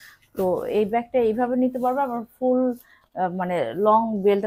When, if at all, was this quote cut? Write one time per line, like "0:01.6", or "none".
none